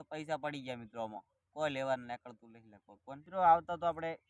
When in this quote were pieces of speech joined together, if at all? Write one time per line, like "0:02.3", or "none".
0:03.2